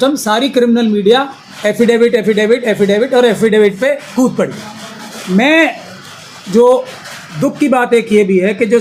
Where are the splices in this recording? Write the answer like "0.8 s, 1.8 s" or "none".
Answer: none